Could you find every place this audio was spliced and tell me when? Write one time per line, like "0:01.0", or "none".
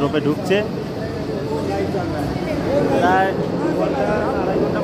none